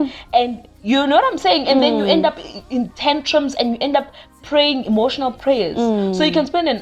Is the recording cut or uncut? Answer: uncut